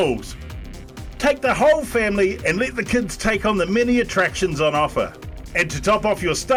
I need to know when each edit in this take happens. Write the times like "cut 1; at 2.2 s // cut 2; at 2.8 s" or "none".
none